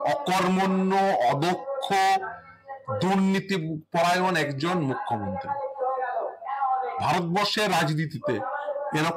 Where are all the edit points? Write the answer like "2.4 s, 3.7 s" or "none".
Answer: none

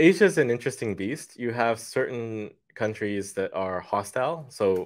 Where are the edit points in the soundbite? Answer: none

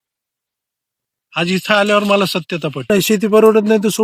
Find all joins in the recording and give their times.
2.9 s

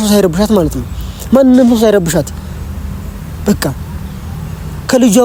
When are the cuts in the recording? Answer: none

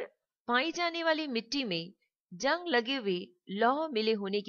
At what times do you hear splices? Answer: 1.9 s

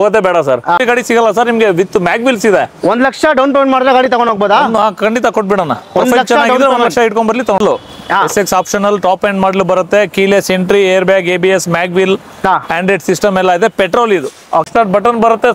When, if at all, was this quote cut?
0.8 s, 7.6 s, 14.7 s

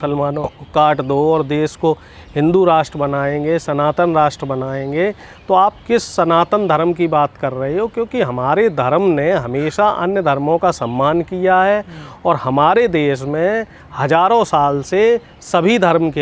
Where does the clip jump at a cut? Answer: none

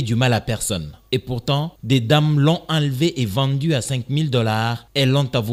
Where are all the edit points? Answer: none

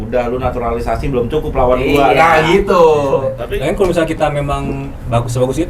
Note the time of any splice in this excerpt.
3.5 s

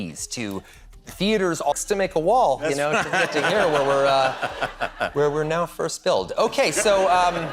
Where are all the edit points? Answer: 1.7 s

